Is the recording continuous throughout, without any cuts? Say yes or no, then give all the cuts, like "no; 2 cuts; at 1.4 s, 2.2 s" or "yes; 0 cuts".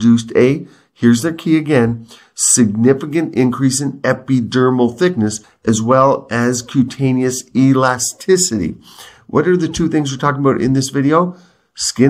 no; 1 cut; at 5.5 s